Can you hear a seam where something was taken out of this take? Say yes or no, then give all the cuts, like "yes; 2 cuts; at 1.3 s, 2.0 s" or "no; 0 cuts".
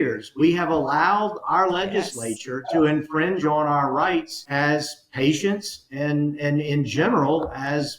yes; 1 cut; at 4.4 s